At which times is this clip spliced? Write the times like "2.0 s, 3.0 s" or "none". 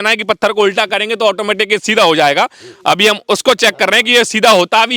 none